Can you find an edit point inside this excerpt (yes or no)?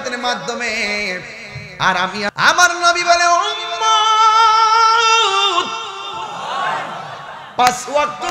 yes